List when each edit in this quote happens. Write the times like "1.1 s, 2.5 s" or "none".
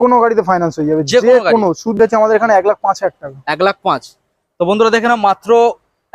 2.0 s